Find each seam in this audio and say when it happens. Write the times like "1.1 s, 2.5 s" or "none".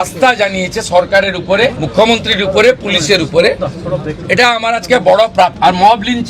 1.8 s, 5.5 s